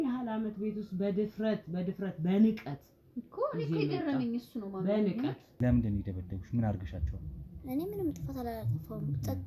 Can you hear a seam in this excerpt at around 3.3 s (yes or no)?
no